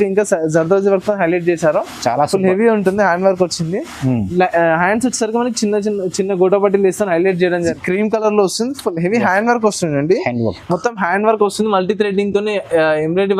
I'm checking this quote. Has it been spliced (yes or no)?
yes